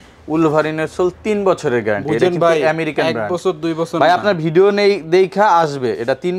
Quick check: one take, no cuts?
yes; 0 cuts

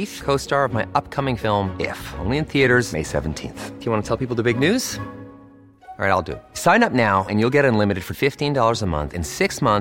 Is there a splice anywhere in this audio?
no; 0 cuts

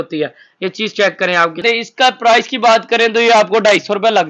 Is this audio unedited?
no; 1 cut; at 1.6 s

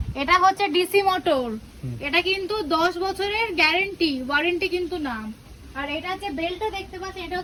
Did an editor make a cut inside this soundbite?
no; 0 cuts

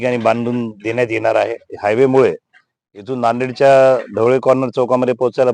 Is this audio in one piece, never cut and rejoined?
no; 1 cut; at 1.7 s

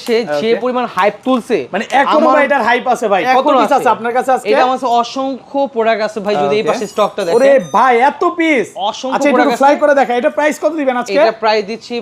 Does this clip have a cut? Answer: no; 0 cuts

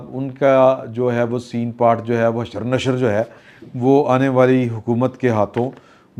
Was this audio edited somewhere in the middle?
no; 0 cuts

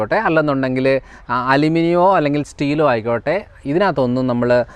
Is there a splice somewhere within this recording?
no; 0 cuts

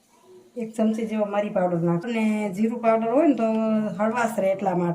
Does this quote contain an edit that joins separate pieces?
yes; 1 cut; at 2.1 s

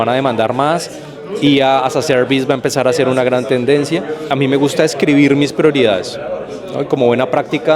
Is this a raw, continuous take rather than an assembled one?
no; 1 cut; at 4.2 s

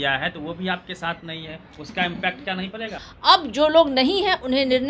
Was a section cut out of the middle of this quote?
yes; 1 cut; at 3.0 s

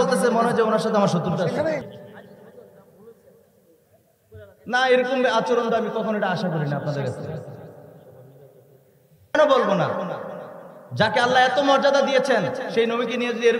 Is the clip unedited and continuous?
no; 2 cuts; at 1.8 s, 9.3 s

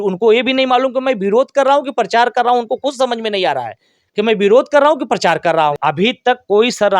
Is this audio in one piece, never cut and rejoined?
no; 1 cut; at 5.8 s

